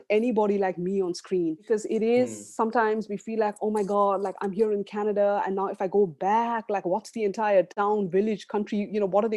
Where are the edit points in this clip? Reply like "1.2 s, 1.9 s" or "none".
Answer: 1.7 s